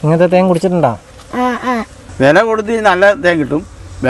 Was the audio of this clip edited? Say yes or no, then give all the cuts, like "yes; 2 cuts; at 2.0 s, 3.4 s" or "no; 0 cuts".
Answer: yes; 1 cut; at 2.0 s